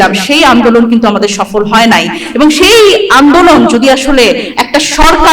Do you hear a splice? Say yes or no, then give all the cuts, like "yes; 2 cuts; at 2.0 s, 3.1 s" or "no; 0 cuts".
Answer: no; 0 cuts